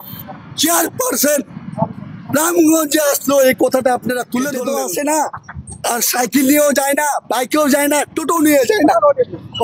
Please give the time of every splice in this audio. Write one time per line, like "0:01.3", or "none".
0:04.5